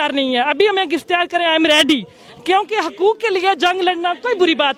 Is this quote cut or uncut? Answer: uncut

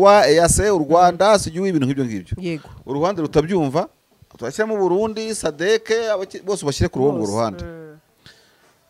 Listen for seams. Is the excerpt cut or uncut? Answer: uncut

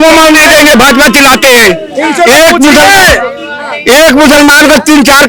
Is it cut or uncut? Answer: uncut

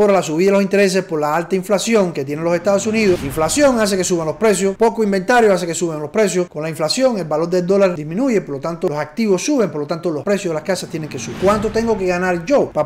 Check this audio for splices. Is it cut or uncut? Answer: cut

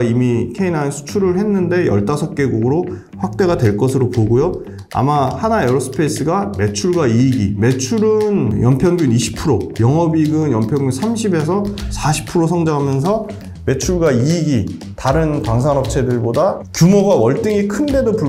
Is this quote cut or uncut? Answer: uncut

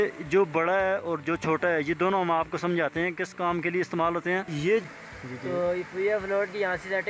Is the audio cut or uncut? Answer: cut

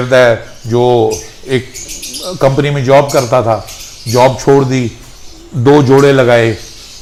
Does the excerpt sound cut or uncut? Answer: uncut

